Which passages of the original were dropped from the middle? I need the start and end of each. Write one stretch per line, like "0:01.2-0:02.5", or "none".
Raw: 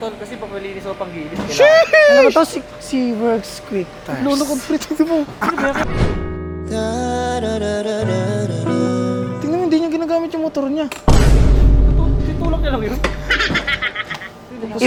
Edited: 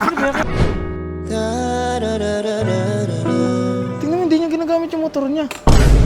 none